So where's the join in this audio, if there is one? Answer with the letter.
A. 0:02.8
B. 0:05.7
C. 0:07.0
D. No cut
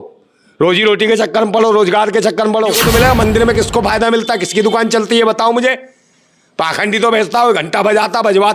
A